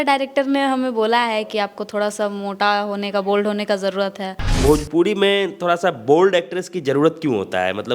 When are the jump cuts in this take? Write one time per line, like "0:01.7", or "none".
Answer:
0:04.6